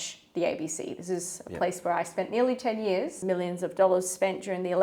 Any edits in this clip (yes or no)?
yes